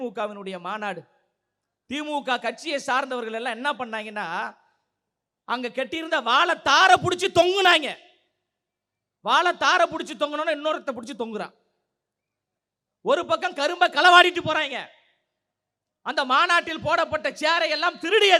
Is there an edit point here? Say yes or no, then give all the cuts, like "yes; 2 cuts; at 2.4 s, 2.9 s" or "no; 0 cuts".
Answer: no; 0 cuts